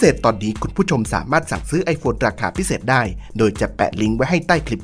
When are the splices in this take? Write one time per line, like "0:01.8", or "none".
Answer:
none